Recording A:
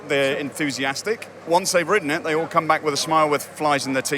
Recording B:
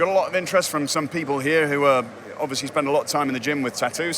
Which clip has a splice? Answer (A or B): A